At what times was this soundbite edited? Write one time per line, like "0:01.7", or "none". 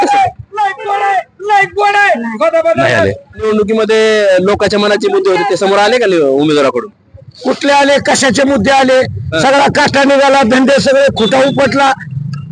0:03.5